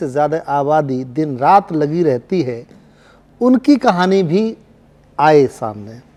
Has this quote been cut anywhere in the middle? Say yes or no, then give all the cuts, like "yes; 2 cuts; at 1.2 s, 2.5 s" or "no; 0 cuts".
no; 0 cuts